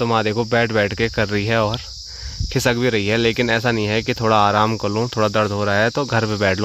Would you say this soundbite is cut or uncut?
uncut